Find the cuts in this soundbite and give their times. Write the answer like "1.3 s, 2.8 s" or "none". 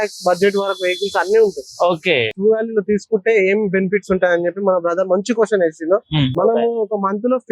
2.3 s, 6.3 s